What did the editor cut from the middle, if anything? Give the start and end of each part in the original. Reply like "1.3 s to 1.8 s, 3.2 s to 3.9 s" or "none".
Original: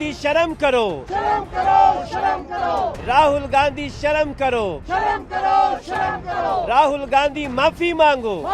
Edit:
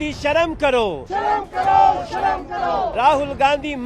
2.9 s to 6.7 s